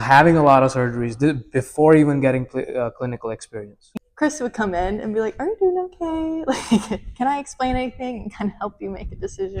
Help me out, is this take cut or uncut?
cut